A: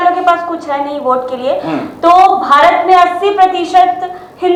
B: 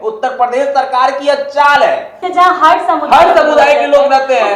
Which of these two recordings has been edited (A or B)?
B